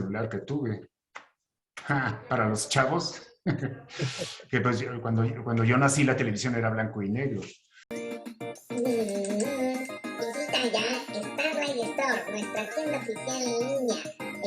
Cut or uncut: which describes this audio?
cut